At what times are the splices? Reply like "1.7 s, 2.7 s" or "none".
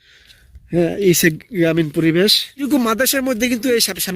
2.7 s